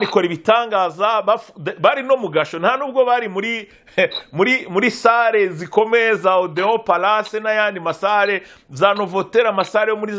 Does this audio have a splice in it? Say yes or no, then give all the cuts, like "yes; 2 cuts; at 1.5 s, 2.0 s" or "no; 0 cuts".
no; 0 cuts